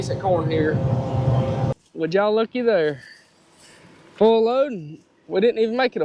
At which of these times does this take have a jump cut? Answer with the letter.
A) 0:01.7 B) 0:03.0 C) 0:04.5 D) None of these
A